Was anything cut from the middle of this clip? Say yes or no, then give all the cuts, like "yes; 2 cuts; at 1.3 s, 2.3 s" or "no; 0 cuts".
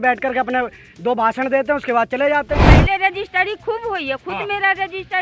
yes; 1 cut; at 2.6 s